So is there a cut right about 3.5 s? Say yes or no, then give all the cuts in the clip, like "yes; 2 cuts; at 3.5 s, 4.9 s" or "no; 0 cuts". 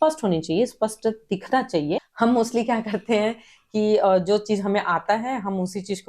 no; 1 cut; at 2.1 s